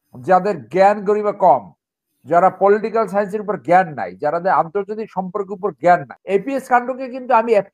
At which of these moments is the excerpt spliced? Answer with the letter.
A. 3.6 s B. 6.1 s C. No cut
B